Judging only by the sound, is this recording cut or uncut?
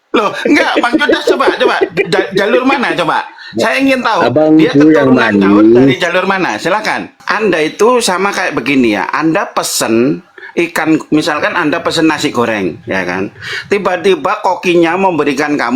cut